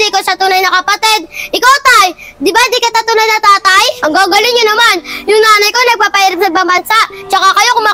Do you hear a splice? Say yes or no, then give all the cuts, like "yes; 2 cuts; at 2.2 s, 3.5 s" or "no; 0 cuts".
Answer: yes; 1 cut; at 3.9 s